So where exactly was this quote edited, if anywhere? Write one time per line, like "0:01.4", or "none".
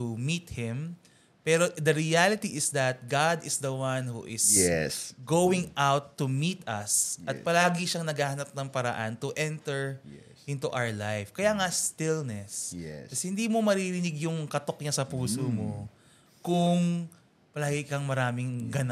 none